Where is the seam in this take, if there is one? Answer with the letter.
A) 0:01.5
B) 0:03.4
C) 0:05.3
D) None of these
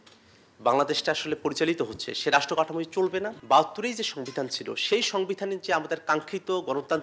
B